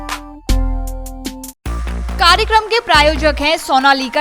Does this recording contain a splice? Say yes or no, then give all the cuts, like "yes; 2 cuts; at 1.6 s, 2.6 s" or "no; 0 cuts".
no; 0 cuts